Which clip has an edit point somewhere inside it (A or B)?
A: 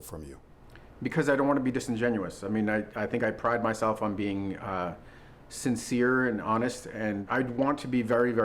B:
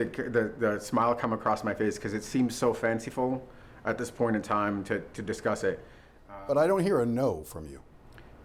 A